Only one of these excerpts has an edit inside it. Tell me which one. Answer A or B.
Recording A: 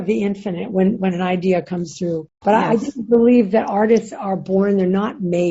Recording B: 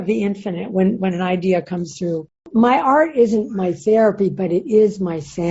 B